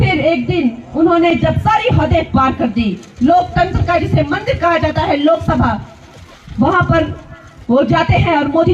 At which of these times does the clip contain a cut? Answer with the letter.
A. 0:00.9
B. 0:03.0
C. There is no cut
B